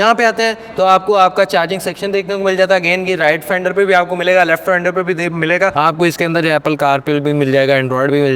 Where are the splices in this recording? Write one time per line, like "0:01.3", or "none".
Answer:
0:05.7